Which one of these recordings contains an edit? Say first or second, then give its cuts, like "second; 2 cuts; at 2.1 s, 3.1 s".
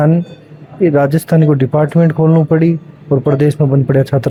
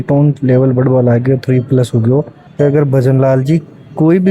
second; 1 cut; at 2.4 s